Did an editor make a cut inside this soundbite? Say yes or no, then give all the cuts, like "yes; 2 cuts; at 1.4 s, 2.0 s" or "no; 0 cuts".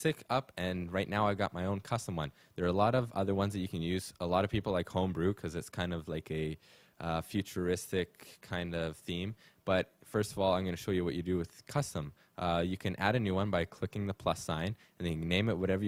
no; 0 cuts